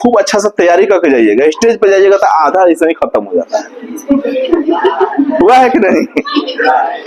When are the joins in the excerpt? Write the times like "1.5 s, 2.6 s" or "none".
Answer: none